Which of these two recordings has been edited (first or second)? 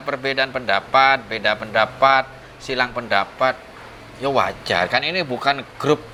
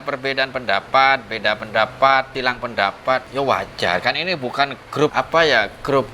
second